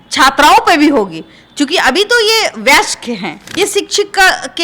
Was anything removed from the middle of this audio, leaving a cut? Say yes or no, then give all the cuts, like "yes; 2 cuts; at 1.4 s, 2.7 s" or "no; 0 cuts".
yes; 1 cut; at 3.4 s